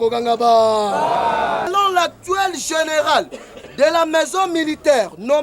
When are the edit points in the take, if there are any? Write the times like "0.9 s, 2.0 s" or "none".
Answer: 1.7 s